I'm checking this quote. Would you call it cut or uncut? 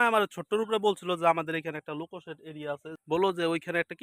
cut